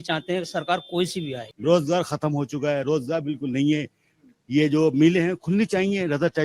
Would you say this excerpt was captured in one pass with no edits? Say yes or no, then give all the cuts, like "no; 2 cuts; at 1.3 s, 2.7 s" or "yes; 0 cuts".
no; 1 cut; at 1.4 s